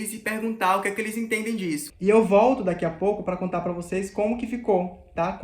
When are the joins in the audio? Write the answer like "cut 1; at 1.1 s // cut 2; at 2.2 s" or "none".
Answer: cut 1; at 1.9 s